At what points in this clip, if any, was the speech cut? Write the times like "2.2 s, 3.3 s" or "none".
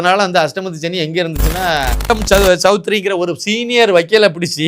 2.1 s